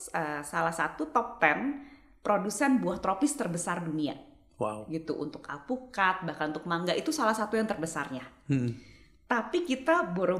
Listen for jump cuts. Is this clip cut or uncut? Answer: uncut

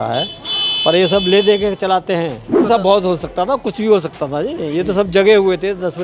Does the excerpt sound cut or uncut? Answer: cut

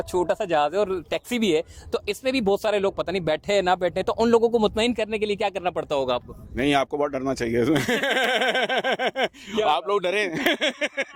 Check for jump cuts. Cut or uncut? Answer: uncut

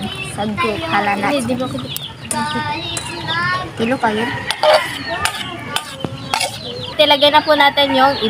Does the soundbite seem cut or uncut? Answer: cut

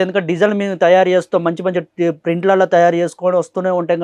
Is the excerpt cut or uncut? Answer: uncut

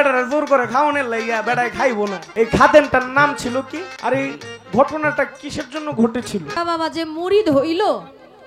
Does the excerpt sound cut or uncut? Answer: cut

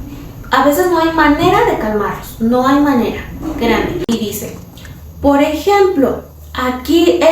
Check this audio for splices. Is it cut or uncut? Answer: cut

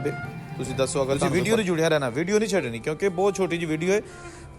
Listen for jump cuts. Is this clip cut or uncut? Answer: cut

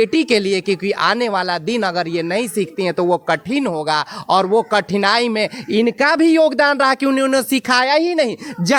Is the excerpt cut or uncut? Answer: uncut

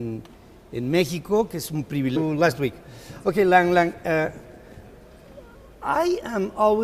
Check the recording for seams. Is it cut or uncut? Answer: uncut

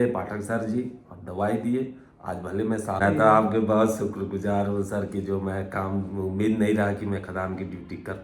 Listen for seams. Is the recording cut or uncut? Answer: cut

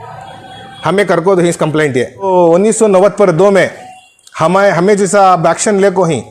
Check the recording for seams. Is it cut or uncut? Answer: cut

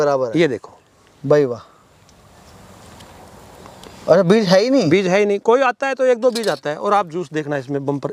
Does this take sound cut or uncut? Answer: uncut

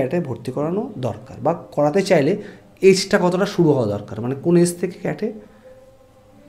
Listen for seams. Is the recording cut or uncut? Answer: uncut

